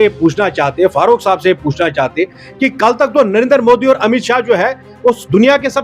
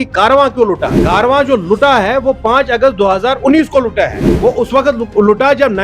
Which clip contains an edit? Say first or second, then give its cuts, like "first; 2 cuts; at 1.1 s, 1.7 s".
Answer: second; 2 cuts; at 0.9 s, 4.2 s